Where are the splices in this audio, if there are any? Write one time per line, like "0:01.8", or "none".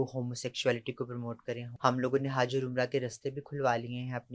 0:01.7